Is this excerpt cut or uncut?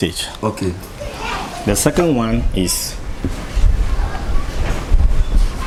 uncut